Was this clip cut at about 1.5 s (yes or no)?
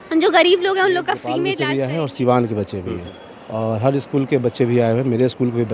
yes